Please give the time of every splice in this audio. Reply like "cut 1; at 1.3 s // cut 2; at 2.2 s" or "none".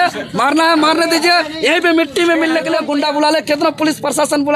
cut 1; at 2.8 s